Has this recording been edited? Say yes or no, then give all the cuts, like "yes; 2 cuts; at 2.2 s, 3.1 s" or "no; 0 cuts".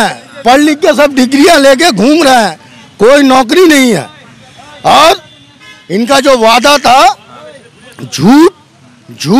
no; 0 cuts